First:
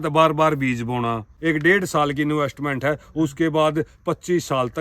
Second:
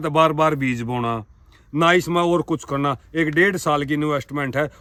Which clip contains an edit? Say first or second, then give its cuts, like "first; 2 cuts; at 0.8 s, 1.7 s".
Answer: first; 1 cut; at 1.3 s